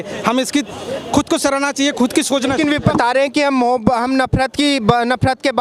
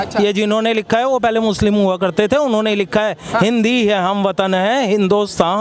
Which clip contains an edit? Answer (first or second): first